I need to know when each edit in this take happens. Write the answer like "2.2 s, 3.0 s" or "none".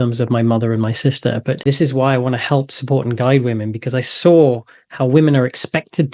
1.6 s